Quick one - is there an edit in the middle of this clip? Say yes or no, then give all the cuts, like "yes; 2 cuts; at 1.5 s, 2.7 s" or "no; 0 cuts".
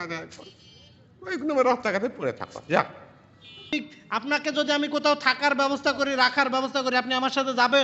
yes; 1 cut; at 3.7 s